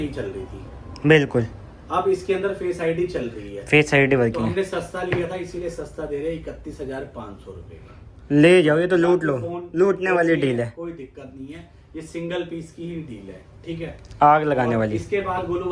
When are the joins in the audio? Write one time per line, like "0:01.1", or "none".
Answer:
none